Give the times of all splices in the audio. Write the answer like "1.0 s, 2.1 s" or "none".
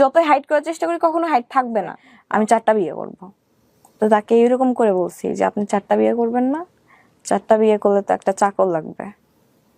2.0 s